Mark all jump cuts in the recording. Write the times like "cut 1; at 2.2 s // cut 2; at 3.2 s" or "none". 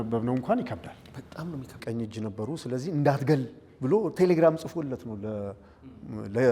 cut 1; at 1.8 s